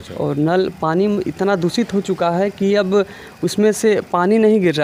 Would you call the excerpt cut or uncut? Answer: uncut